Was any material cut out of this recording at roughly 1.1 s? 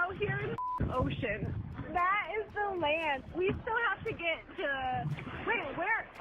no; 2 cuts; at 3.2 s, 5.3 s

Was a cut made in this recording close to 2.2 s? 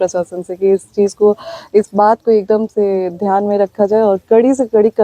no; 0 cuts

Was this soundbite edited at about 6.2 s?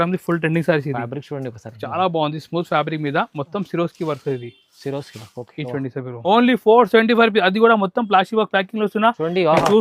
yes; 1 cut; at 6.2 s

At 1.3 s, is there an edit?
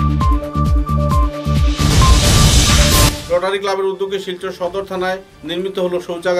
no; 1 cut; at 3.2 s

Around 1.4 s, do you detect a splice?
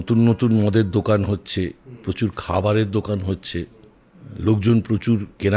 no; 1 cut; at 3.7 s

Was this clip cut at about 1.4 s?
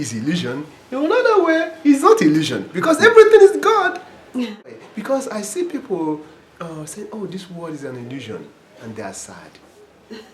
no; 1 cut; at 4.7 s

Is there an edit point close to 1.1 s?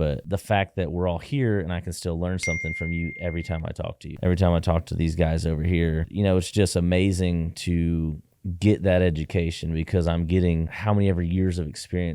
no; 2 cuts; at 4.1 s, 6.0 s

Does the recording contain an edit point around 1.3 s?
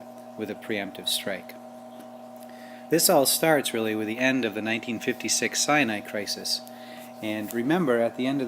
yes; 1 cut; at 1.3 s

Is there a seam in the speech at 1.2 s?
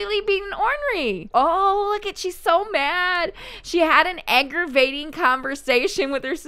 yes; 1 cut; at 1.2 s

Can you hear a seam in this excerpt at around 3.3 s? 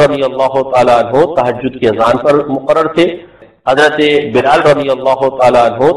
yes; 1 cut; at 3.3 s

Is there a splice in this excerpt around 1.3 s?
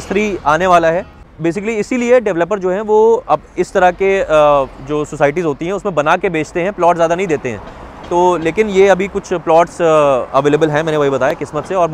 yes; 1 cut; at 1.3 s

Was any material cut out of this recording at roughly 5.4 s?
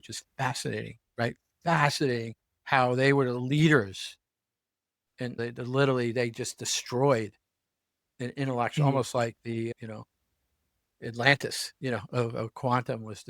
yes; 2 cuts; at 5.4 s, 9.7 s

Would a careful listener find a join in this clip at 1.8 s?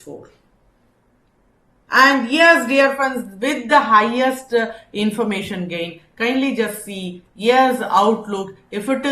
yes; 1 cut; at 1.8 s

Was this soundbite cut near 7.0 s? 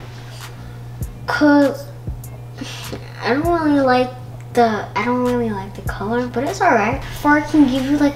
yes; 1 cut; at 7.0 s

